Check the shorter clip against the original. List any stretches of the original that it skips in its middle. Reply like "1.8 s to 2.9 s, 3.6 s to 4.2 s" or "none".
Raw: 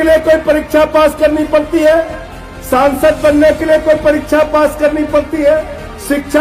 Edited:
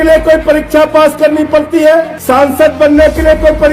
2.2 s to 2.6 s

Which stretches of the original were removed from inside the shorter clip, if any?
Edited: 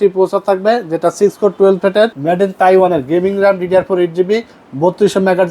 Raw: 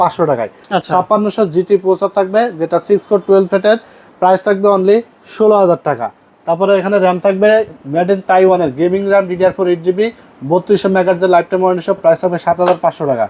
3.9 s to 7.9 s

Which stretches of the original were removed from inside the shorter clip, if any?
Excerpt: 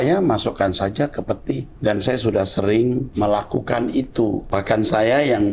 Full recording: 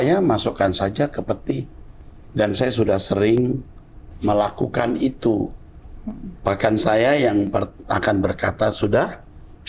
1.7 s to 2.2 s, 3.6 s to 4.1 s, 5.5 s to 6.4 s

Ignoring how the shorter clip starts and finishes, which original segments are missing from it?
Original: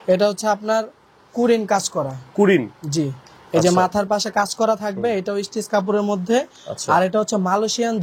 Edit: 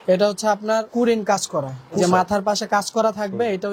0.9 s to 1.3 s, 2.4 s to 3.6 s

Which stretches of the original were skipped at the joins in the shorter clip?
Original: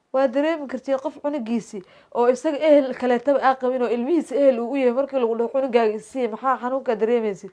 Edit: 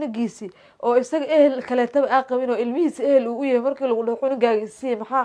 none

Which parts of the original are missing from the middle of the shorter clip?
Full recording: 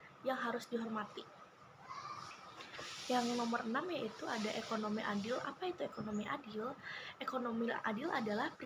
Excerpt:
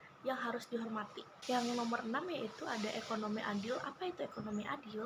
1.3 s to 2.9 s

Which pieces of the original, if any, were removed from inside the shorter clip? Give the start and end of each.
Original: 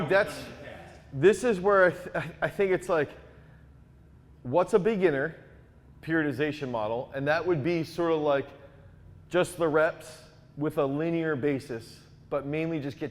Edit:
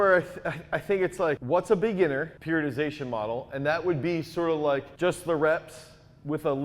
3.1 s to 4.4 s, 5.4 s to 6.0 s, 8.5 s to 9.2 s

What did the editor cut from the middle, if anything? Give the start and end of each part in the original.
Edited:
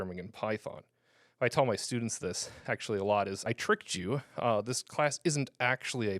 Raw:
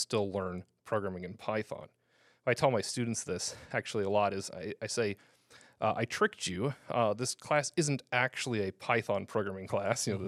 4.5 s to 6.0 s

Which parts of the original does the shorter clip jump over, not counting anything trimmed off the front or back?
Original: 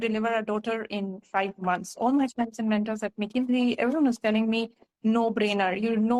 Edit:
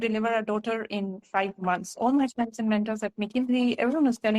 none

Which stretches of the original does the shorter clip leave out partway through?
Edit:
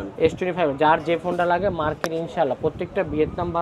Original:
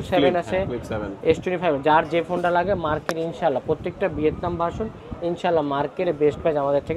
none

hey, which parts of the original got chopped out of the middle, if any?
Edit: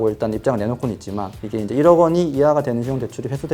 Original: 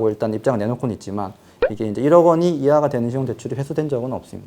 1.5 s to 1.7 s

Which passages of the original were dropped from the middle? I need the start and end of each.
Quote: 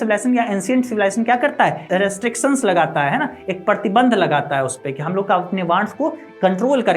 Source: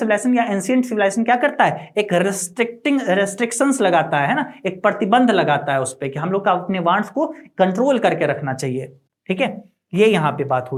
1.9 s to 3.0 s

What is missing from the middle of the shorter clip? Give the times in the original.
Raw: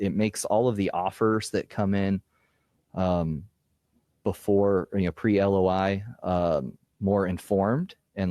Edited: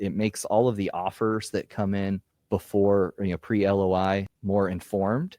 2.3 s to 4.1 s, 6.1 s to 6.9 s

